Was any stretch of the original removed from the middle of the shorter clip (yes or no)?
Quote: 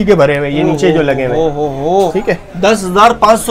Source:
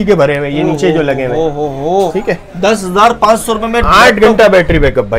no